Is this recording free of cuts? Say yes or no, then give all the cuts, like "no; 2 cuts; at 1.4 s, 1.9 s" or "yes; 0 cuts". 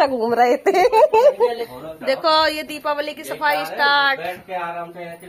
no; 1 cut; at 1.7 s